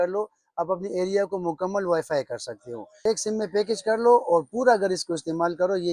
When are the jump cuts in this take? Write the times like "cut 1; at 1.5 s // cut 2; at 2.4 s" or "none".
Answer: cut 1; at 3.0 s